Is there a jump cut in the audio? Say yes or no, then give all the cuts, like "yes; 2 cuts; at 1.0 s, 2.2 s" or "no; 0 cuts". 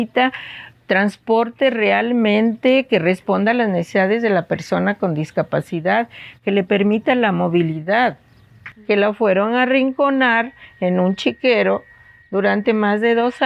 yes; 1 cut; at 8.7 s